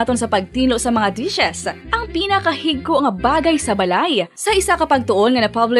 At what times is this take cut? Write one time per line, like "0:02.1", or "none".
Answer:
none